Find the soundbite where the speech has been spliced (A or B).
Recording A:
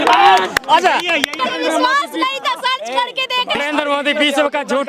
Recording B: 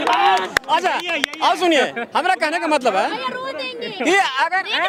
A